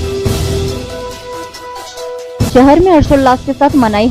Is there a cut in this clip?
yes; 1 cut; at 1.2 s

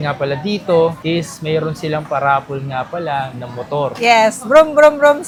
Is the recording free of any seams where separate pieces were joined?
yes; 0 cuts

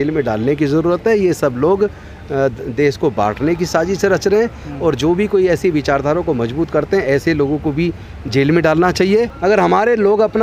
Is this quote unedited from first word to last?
no; 1 cut; at 9.3 s

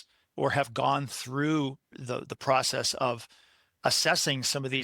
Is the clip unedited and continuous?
no; 1 cut; at 1.9 s

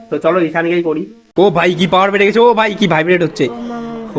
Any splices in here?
yes; 1 cut; at 1.2 s

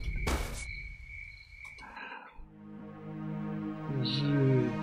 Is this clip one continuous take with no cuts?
yes; 0 cuts

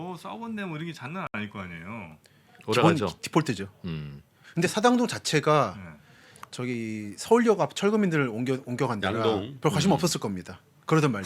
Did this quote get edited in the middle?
no; 0 cuts

